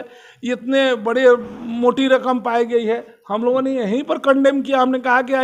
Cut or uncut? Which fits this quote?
uncut